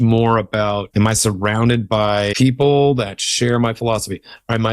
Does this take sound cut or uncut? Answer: cut